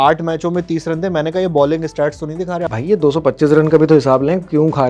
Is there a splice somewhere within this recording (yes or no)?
yes